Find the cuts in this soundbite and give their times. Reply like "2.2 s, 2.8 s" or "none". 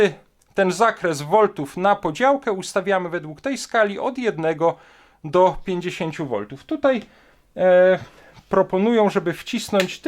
none